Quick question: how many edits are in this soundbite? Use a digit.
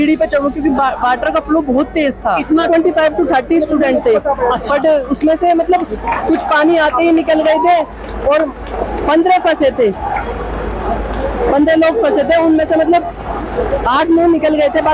1